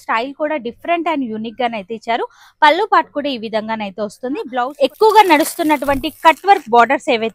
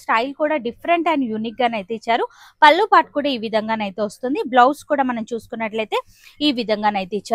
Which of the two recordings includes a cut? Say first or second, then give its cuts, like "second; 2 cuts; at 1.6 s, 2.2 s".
first; 1 cut; at 4.5 s